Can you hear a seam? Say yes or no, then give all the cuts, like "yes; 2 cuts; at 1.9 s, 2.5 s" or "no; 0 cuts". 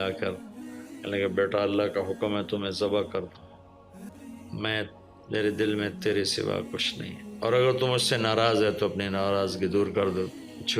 yes; 1 cut; at 4.1 s